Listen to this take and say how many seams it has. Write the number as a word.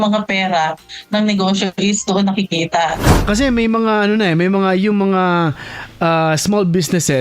one